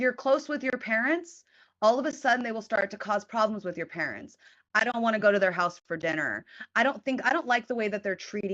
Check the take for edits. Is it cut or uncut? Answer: uncut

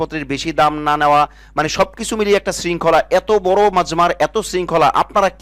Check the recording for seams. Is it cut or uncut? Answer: uncut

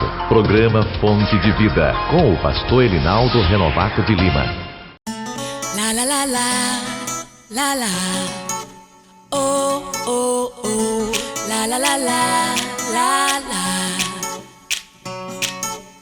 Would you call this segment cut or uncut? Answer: cut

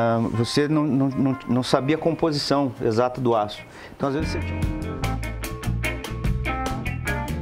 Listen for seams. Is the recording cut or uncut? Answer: cut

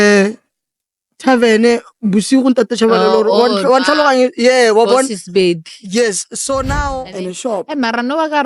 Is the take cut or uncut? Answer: cut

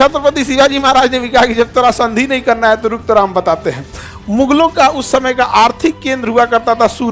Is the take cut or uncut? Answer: uncut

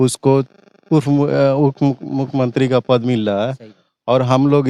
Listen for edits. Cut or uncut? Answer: uncut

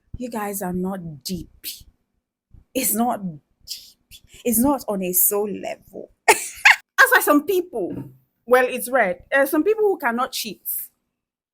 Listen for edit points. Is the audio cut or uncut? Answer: cut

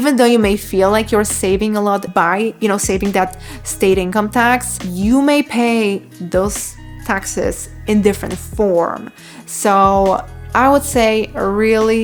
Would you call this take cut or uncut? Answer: uncut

